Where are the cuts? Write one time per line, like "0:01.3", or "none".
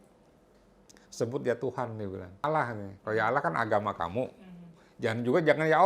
0:02.4